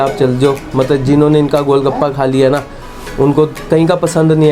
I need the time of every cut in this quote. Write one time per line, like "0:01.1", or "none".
0:03.6